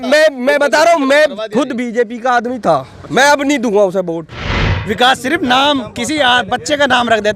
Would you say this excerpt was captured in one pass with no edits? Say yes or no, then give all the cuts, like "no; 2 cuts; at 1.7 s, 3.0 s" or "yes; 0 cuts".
no; 1 cut; at 4.7 s